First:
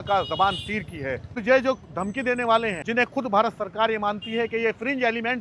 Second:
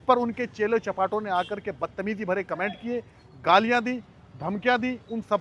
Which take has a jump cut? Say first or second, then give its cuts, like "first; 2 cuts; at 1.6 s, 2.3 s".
first; 2 cuts; at 1.4 s, 2.8 s